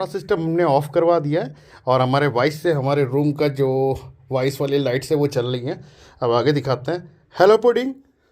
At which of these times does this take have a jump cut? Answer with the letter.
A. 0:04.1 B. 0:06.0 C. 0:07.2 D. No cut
D